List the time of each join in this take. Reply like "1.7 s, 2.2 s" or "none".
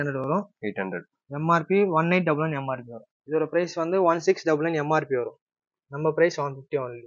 3.1 s